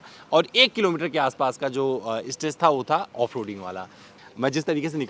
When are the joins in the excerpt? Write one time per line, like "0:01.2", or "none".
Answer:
0:04.1